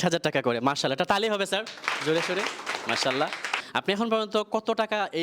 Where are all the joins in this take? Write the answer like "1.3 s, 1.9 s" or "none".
3.6 s